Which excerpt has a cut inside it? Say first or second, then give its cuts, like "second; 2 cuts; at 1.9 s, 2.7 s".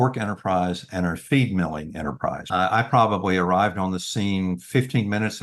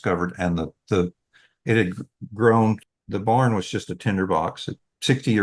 first; 1 cut; at 2.4 s